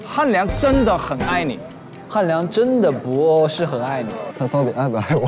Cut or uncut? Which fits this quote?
cut